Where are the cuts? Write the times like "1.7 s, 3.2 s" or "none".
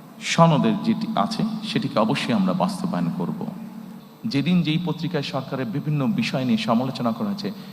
3.9 s